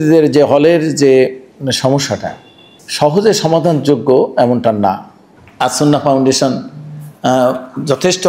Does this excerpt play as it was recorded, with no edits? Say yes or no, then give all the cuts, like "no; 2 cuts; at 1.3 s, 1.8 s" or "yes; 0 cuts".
yes; 0 cuts